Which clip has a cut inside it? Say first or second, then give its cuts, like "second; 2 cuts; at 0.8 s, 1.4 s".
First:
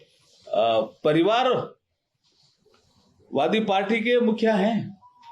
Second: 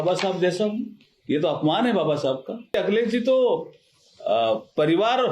second; 1 cut; at 2.7 s